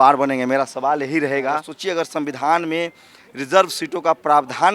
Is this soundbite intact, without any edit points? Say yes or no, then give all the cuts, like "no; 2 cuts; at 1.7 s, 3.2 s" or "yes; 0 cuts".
no; 1 cut; at 1.7 s